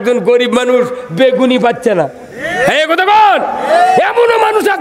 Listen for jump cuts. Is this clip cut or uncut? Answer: uncut